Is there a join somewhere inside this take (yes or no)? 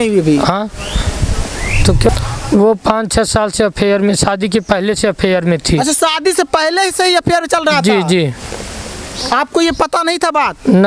yes